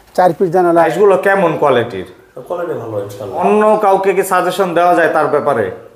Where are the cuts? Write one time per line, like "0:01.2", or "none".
0:00.9
0:03.4